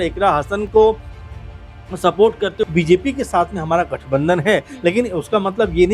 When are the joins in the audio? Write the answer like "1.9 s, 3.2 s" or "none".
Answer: 2.6 s

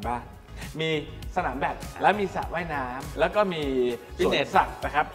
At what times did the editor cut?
1.9 s

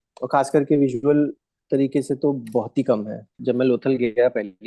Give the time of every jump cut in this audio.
3.3 s

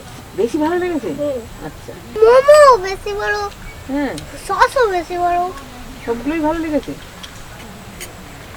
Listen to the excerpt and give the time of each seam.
none

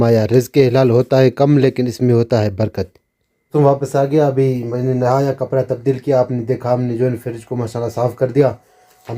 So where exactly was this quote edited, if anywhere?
none

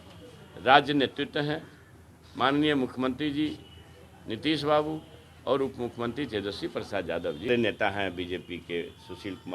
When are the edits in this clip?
7.5 s

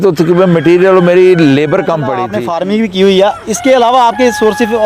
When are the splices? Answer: 2.3 s

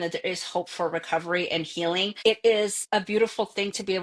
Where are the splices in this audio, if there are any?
2.1 s, 2.8 s

